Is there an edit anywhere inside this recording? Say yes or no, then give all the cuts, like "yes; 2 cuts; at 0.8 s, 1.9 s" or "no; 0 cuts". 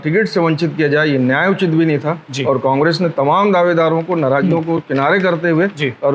no; 0 cuts